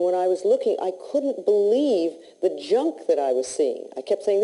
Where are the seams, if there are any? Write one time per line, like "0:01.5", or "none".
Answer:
0:03.5